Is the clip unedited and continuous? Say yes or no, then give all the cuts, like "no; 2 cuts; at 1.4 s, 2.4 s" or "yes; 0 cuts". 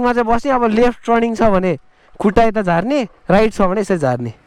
yes; 0 cuts